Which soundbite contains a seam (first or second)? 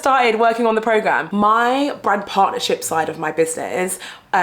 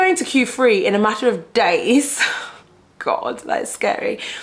first